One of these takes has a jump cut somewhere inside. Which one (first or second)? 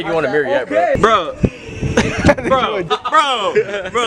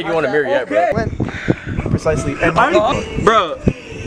first